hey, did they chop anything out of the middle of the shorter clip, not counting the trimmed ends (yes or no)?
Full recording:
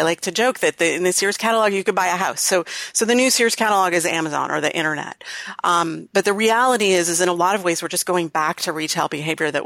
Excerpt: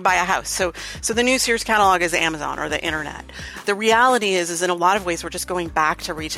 yes